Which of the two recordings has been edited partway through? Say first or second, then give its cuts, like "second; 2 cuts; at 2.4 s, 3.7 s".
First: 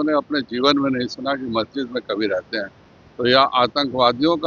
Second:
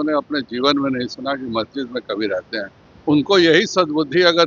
second; 1 cut; at 2.8 s